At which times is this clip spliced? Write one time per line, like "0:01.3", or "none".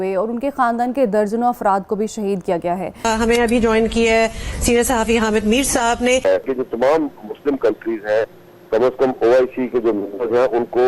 0:03.0
0:06.2